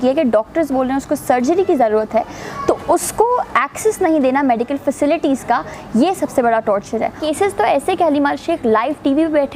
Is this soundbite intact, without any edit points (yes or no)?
no